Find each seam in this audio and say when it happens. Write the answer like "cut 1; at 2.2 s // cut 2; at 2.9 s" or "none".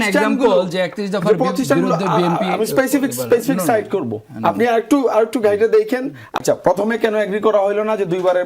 cut 1; at 6.4 s